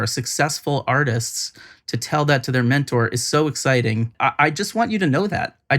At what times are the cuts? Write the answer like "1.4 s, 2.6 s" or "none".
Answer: 4.1 s